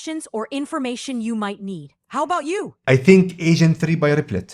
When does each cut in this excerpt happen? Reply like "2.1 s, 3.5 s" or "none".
2.8 s